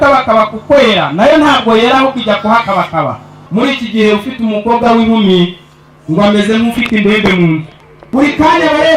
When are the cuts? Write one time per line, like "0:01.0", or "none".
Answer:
0:03.4
0:07.9